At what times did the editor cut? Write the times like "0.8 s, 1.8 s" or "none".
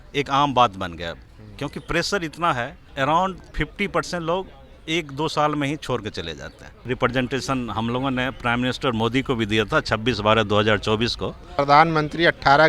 2.8 s, 6.9 s, 11.6 s